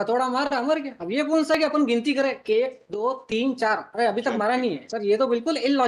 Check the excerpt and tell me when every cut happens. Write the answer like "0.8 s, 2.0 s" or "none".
1.0 s, 4.9 s